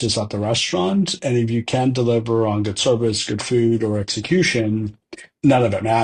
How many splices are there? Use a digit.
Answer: 0